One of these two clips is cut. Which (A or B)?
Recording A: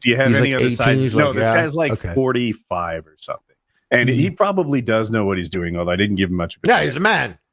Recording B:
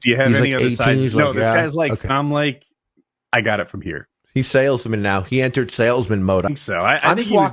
B